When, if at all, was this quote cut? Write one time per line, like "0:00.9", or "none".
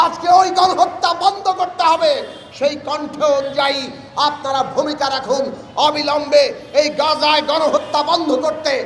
none